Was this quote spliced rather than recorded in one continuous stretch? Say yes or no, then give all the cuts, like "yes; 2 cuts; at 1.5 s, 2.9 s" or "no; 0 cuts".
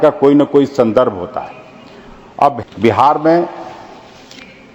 yes; 1 cut; at 2.6 s